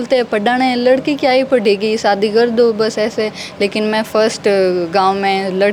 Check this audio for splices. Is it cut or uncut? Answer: uncut